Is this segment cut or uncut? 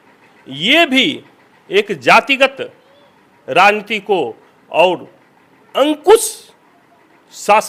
uncut